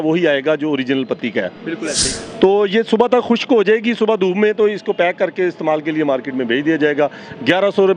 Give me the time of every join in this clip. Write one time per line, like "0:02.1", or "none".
0:02.0